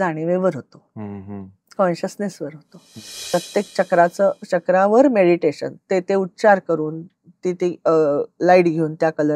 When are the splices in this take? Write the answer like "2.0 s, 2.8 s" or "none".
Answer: 3.2 s